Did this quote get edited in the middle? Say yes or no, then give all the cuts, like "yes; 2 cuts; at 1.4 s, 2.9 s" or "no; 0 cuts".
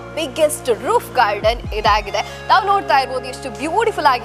no; 0 cuts